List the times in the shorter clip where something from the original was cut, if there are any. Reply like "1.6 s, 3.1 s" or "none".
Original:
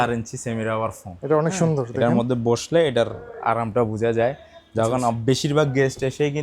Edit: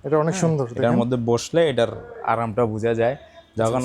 none